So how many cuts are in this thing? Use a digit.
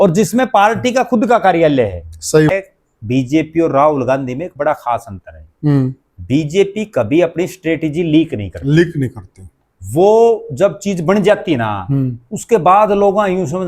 1